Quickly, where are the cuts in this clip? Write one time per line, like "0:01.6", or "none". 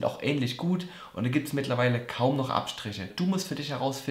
0:03.1